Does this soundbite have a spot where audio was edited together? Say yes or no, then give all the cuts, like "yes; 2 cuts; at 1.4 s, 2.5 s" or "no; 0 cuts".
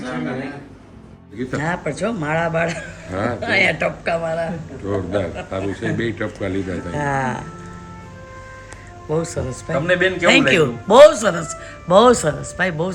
yes; 1 cut; at 1.3 s